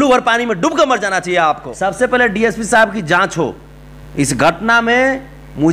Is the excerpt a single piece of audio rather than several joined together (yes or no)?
no